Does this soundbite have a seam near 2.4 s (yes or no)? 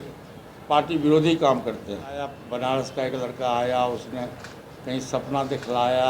yes